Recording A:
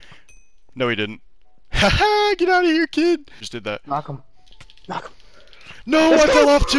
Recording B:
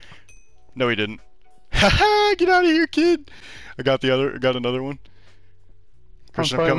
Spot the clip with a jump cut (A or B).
A